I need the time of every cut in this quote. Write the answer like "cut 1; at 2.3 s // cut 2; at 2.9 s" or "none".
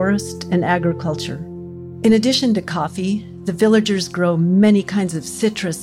none

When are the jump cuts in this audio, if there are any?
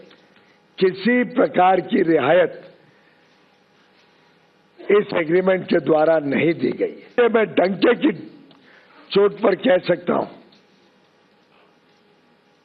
cut 1; at 7.2 s

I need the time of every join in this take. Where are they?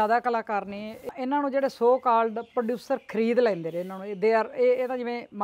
cut 1; at 1.1 s

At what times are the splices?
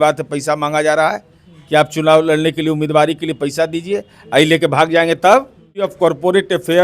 cut 1; at 5.9 s

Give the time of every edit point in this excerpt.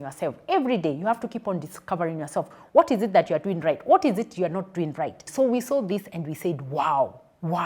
cut 1; at 5.2 s

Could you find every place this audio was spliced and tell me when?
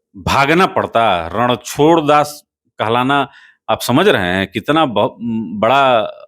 none

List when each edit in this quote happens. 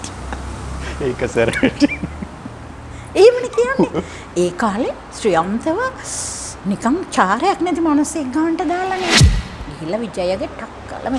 cut 1; at 9.2 s

